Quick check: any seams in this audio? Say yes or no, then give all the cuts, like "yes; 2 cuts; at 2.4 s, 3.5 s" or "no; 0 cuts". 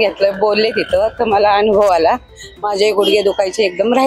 no; 0 cuts